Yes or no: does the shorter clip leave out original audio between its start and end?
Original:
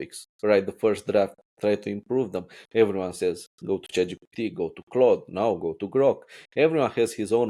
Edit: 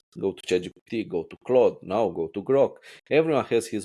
no